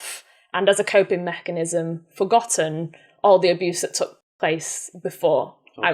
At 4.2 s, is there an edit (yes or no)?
yes